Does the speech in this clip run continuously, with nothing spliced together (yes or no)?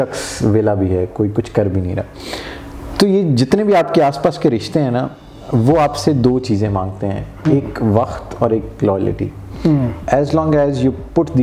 yes